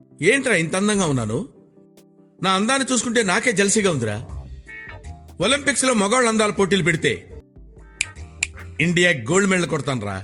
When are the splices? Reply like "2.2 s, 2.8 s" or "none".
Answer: none